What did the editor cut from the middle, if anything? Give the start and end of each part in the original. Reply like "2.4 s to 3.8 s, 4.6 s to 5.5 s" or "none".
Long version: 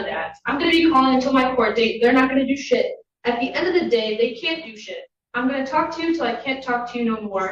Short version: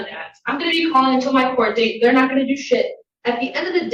none

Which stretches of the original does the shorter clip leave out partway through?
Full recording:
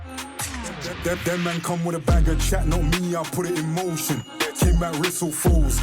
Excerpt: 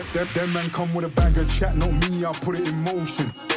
none

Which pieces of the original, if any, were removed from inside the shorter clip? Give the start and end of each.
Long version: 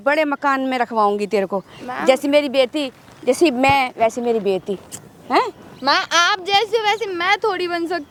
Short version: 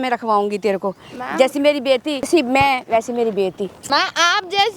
3.0 s to 3.4 s, 4.9 s to 5.7 s

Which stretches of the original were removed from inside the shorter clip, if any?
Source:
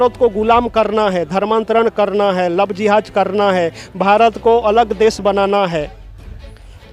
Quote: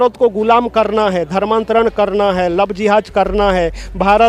none

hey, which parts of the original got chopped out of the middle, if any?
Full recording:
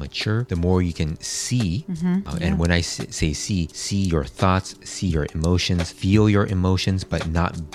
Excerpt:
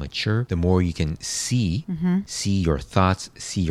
2.3 s to 3.8 s

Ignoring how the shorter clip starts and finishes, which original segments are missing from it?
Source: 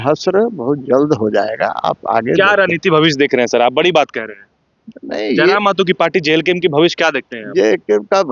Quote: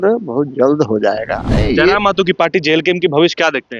1.7 s to 5.0 s

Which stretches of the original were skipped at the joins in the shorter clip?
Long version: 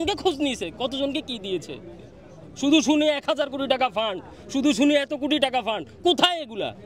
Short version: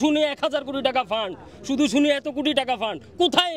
none

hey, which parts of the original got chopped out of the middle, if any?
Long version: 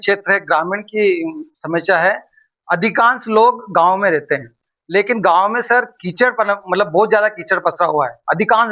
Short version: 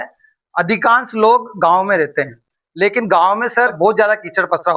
5.9 s to 6.9 s

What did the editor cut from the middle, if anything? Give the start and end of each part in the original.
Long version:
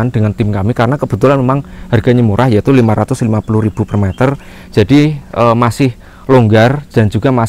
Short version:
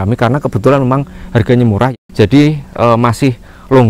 2.5 s to 4.5 s

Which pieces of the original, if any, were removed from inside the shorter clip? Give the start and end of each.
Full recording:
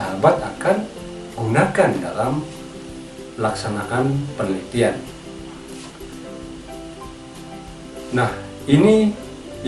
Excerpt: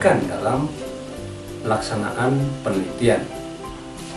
5.0 s to 6.6 s

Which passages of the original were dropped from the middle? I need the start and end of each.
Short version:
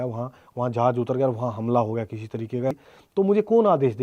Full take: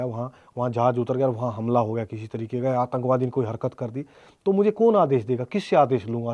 2.7 s to 4.0 s

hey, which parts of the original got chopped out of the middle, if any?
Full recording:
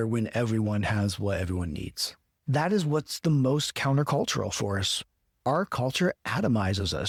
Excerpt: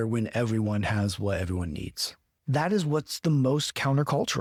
none

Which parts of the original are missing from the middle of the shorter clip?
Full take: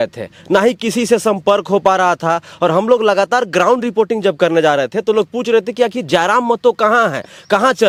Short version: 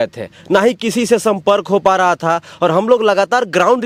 none

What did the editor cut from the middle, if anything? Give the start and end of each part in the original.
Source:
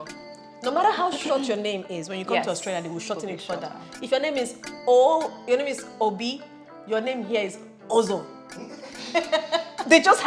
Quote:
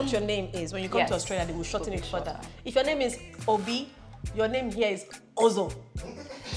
4.7 s to 5.8 s

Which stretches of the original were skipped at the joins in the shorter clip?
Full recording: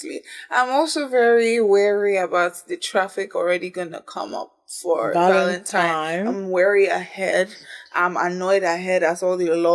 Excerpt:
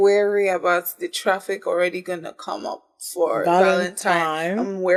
none

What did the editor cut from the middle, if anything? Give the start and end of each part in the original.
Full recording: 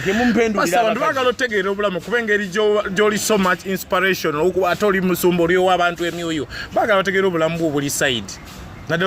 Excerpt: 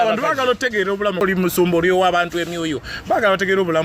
2.0 s to 4.9 s

